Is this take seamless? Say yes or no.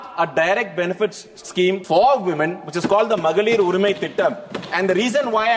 no